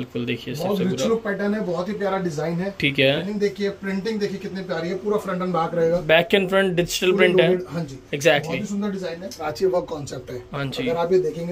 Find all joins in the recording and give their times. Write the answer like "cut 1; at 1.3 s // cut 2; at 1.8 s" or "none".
cut 1; at 3.2 s // cut 2; at 9.4 s